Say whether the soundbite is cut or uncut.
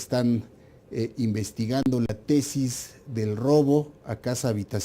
cut